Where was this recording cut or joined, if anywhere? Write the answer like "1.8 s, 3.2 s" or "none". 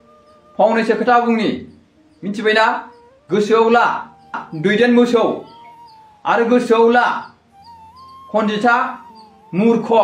none